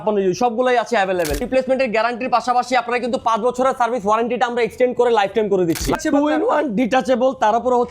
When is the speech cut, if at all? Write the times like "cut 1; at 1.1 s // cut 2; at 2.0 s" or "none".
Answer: cut 1; at 1.4 s // cut 2; at 6.0 s